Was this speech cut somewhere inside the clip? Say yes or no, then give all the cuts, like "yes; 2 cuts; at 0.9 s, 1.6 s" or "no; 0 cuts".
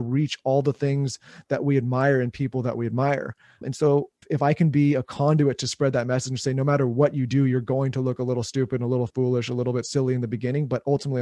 yes; 1 cut; at 4.2 s